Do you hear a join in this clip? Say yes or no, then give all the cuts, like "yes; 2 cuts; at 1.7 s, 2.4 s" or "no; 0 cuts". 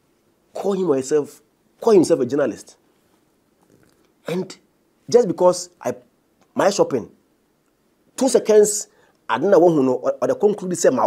no; 0 cuts